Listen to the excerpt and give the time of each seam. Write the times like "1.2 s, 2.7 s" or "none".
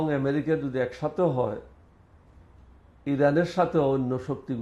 none